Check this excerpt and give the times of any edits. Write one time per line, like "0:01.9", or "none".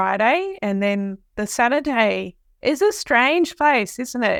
none